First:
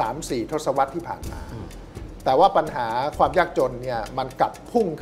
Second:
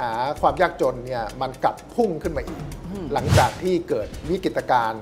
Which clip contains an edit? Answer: second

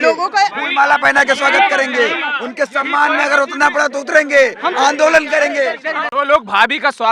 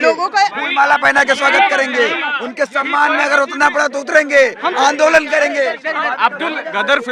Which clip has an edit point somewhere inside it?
first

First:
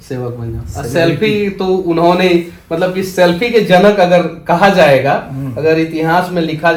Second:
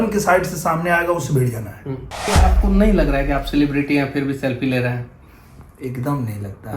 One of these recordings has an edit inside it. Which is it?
second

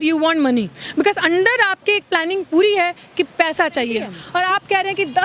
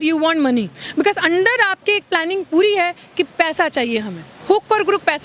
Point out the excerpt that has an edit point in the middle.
first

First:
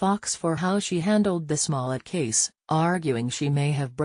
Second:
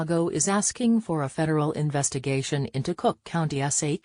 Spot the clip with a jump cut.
first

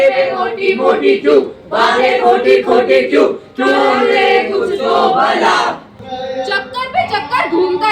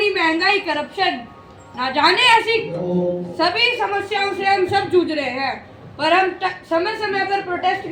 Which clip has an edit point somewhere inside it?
first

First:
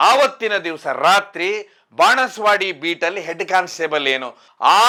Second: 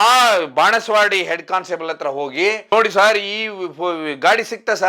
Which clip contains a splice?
second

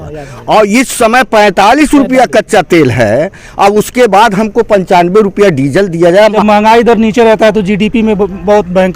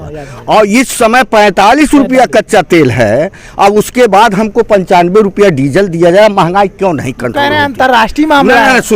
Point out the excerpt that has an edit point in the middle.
first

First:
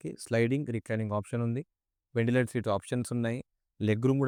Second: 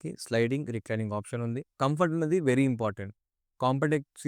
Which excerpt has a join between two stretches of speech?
second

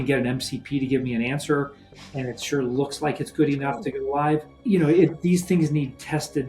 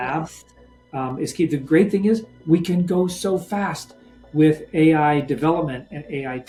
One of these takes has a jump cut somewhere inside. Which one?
first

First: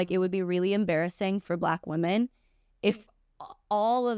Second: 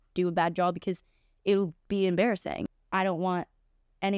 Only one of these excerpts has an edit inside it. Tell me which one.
second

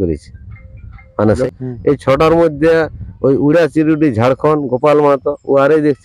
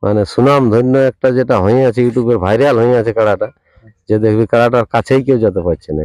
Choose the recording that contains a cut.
first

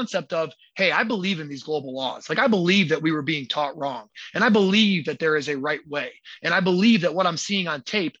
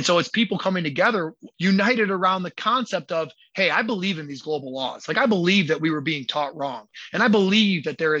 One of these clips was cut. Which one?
second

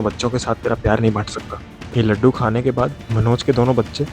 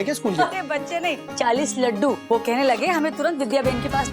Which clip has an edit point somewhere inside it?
second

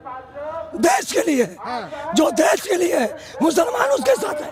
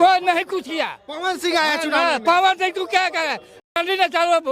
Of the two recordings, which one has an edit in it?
second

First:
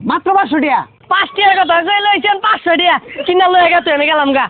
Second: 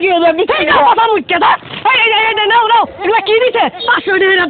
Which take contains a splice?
first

